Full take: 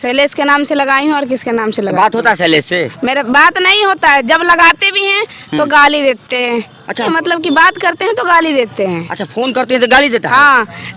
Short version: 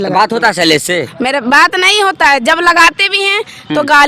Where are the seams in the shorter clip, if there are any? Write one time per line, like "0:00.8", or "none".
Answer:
none